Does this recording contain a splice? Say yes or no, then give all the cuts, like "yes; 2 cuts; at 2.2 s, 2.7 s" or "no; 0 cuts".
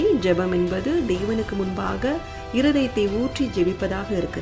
no; 0 cuts